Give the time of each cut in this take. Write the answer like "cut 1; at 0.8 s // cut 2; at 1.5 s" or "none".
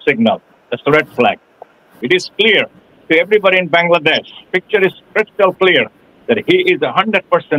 cut 1; at 1.9 s